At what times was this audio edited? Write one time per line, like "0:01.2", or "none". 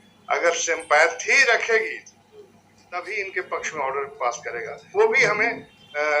0:04.9